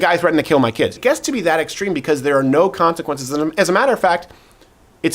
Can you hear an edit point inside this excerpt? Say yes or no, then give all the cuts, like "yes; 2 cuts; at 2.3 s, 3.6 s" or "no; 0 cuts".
yes; 1 cut; at 0.9 s